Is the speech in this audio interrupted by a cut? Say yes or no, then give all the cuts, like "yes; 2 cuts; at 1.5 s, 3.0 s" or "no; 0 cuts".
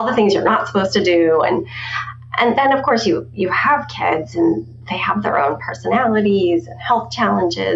no; 0 cuts